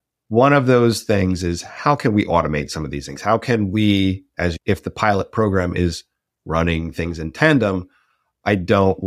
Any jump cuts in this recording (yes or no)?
yes